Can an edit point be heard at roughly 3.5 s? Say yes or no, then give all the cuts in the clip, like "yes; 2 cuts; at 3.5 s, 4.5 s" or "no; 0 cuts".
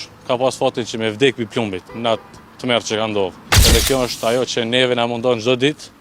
yes; 1 cut; at 3.5 s